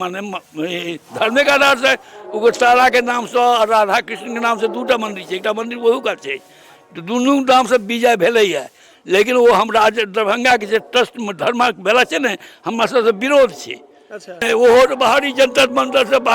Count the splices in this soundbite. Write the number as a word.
one